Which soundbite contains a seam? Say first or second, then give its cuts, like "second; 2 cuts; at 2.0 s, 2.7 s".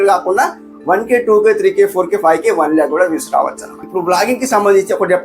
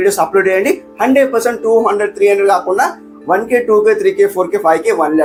first; 1 cut; at 3.9 s